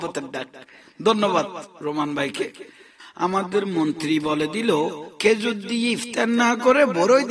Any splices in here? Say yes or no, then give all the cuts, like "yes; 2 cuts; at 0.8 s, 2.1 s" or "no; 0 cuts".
yes; 1 cut; at 3.1 s